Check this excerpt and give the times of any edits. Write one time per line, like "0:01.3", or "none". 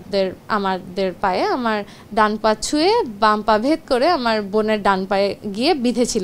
none